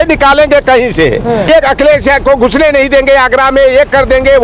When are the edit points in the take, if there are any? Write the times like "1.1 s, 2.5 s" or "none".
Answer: 1.4 s